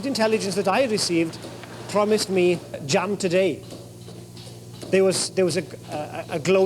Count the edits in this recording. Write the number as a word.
one